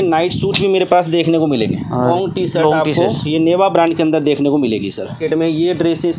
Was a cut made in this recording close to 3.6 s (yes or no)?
no